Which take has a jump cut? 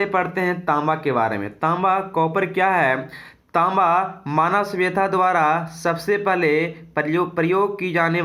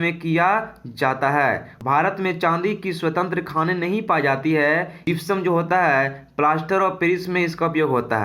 second; 2 cuts; at 1.7 s, 5.0 s

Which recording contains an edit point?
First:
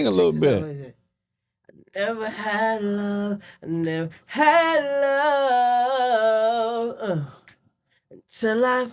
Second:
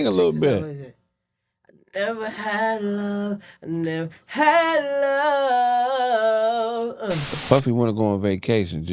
second; 1 cut; at 7.4 s

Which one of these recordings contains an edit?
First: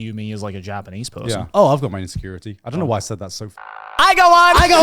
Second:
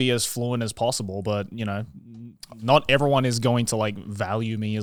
first; 2 cuts; at 1.5 s, 3.8 s

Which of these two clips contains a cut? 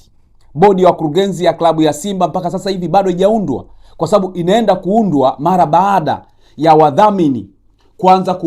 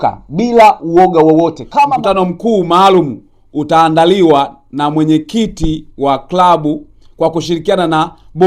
second; 1 cut; at 1.9 s

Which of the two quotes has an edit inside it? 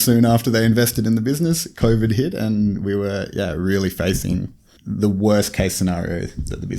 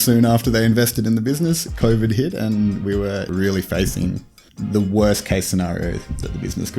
second; 1 cut; at 3.3 s

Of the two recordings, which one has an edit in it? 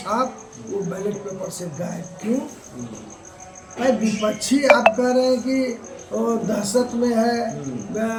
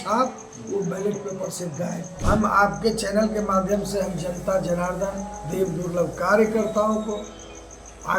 second; 1 cut; at 2.1 s

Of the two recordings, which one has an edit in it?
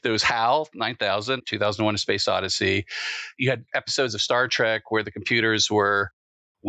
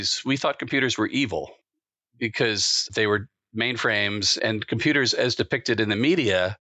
first; 2 cuts; at 1.4 s, 3.4 s

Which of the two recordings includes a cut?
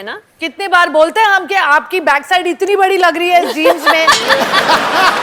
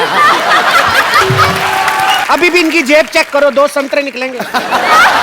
second; 1 cut; at 2.2 s

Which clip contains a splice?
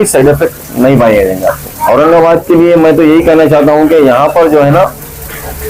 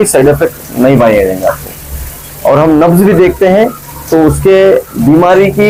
first; 1 cut; at 1.7 s

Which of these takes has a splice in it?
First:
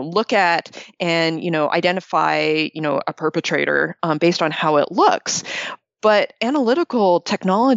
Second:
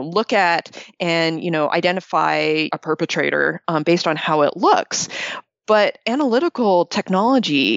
second; 1 cut; at 2.7 s

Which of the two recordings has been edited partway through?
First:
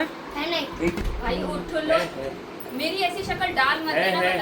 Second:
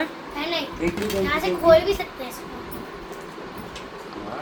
first; 1 cut; at 1.0 s

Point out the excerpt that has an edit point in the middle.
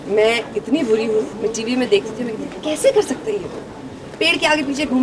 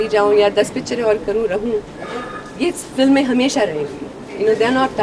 first; 1 cut; at 1.3 s

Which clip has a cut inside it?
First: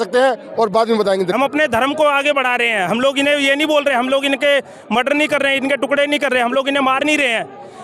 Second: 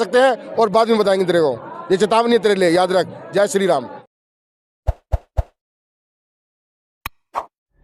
first; 1 cut; at 1.3 s

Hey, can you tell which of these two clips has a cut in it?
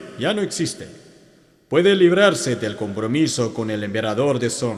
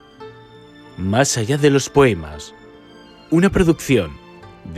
second; 1 cut; at 0.9 s

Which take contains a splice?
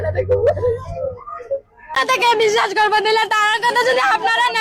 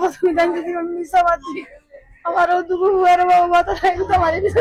first; 1 cut; at 2.0 s

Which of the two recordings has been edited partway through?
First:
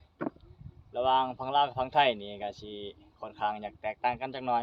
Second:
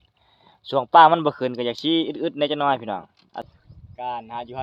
second; 1 cut; at 3.5 s

